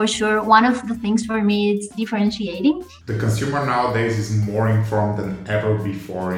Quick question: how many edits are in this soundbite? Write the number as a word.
two